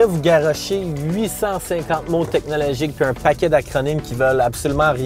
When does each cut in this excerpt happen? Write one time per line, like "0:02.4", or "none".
none

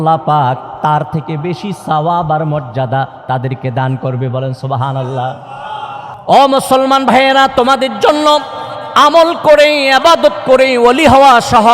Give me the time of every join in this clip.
0:06.1

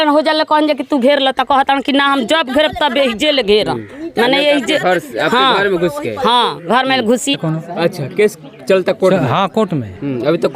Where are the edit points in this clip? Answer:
0:07.3

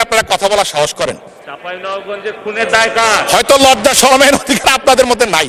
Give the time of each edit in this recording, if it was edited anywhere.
none

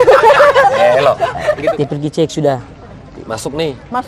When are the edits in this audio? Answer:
0:01.6

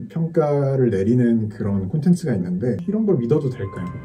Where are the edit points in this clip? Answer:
none

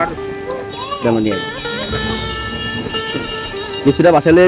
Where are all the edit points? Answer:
none

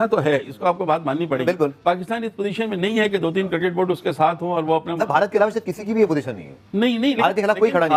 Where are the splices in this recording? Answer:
none

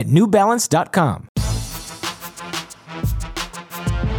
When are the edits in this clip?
0:01.3

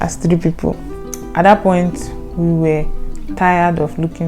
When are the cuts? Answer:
0:01.0

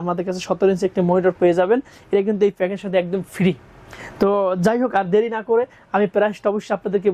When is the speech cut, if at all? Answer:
none

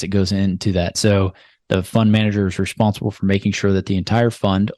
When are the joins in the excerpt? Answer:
0:01.0

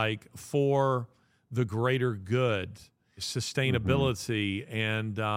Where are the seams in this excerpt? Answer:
0:03.3

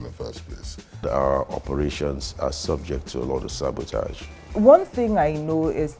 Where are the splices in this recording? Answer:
0:01.0
0:04.3

